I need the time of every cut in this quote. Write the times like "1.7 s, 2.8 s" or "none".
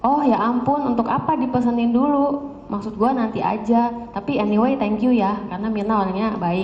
1.3 s